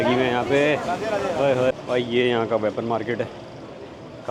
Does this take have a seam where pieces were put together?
yes; 1 cut; at 1.7 s

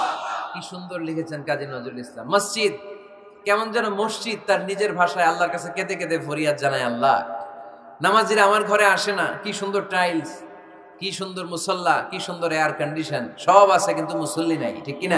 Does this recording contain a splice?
no; 0 cuts

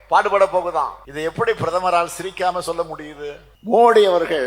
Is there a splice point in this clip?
yes; 2 cuts; at 1.0 s, 3.5 s

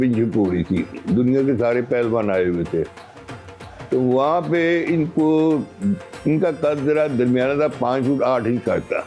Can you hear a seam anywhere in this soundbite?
no; 0 cuts

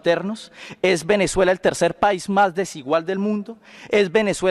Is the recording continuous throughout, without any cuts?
yes; 0 cuts

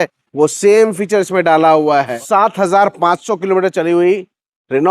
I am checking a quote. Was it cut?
yes; 1 cut; at 2.2 s

